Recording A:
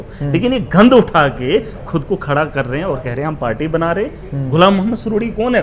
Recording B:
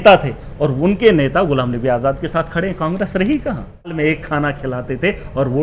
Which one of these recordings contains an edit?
B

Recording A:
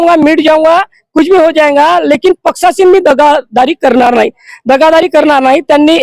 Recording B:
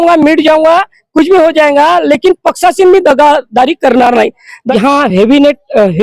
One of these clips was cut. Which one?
B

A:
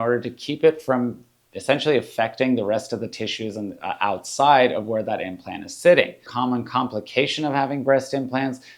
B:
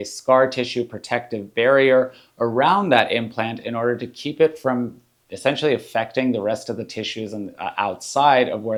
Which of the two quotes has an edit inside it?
A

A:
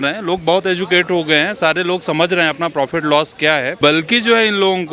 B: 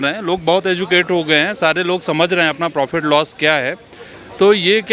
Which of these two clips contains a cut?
A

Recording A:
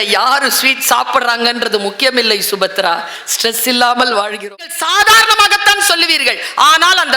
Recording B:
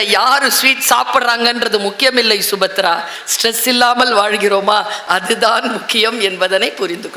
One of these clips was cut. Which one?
A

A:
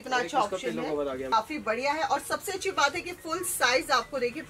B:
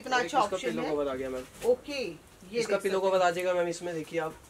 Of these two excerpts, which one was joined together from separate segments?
A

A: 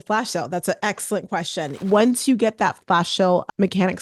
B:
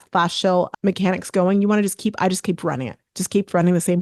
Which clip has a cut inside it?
A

